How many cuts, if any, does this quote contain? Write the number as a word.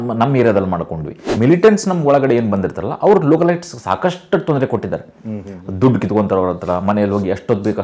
one